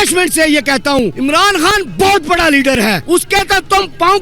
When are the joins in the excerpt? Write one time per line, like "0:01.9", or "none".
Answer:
0:01.1
0:03.0